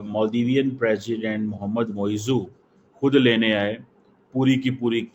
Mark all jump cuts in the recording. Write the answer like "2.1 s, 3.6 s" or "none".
none